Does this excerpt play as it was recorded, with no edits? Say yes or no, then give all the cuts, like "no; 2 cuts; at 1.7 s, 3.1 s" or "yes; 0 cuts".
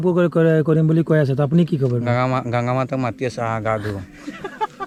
yes; 0 cuts